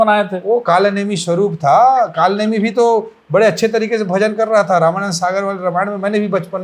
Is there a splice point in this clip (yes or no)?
no